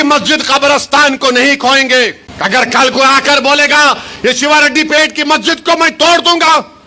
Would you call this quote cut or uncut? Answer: cut